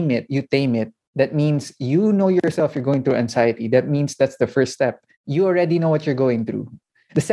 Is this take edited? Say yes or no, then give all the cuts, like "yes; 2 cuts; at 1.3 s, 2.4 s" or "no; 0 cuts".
no; 0 cuts